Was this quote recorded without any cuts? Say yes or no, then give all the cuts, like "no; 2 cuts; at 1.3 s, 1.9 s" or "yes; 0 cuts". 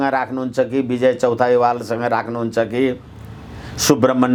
yes; 0 cuts